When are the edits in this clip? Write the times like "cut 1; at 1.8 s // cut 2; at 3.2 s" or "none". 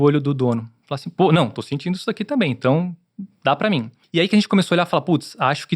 cut 1; at 4.0 s

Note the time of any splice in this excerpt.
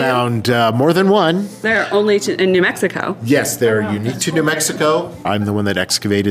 cut 1; at 1.7 s // cut 2; at 5.3 s

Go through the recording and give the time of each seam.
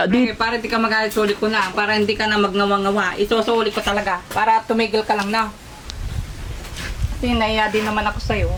none

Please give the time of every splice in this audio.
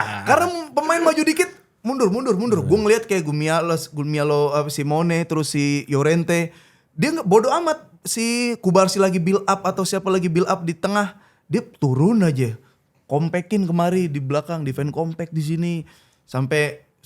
none

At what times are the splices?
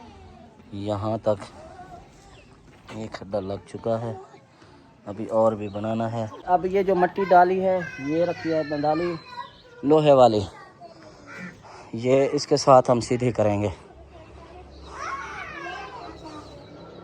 cut 1; at 6.4 s

